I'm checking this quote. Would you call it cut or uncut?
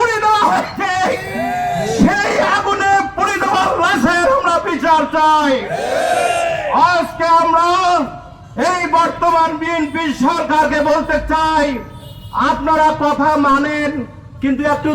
uncut